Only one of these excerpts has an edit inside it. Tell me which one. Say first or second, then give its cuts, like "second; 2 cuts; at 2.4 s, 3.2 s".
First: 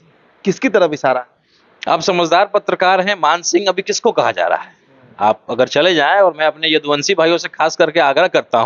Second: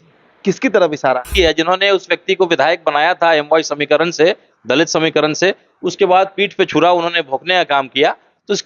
second; 1 cut; at 1.3 s